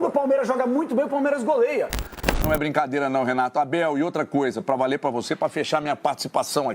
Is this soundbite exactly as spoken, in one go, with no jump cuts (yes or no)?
no